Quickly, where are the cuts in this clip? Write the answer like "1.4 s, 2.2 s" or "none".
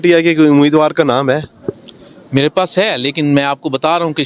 none